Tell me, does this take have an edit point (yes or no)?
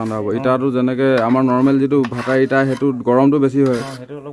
no